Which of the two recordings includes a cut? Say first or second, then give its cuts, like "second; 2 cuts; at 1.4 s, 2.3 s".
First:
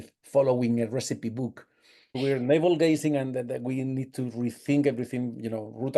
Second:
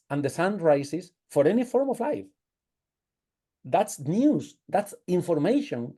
first; 1 cut; at 2.2 s